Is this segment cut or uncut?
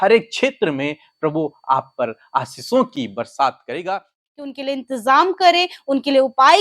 cut